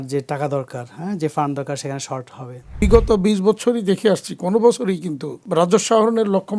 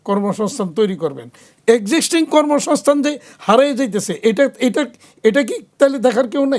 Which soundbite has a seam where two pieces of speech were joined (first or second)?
first